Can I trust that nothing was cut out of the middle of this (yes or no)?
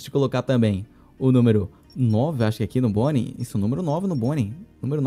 yes